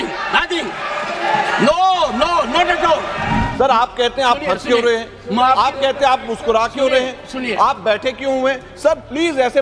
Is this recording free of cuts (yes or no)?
no